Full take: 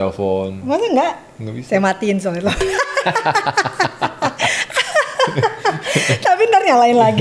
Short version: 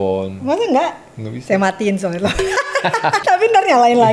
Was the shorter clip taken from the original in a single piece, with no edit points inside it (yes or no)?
no